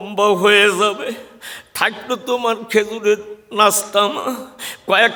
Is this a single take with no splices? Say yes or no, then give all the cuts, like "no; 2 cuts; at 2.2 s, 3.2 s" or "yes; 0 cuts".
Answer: yes; 0 cuts